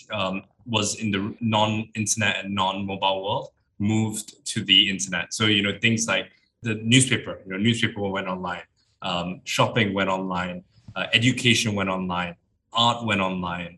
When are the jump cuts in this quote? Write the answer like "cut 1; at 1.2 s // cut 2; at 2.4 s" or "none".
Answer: cut 1; at 1.4 s // cut 2; at 6.6 s